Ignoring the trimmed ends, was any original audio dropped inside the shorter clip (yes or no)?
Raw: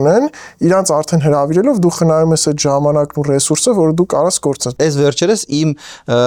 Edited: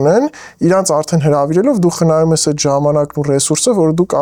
no